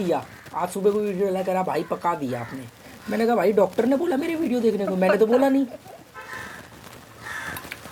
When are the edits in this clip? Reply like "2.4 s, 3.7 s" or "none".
none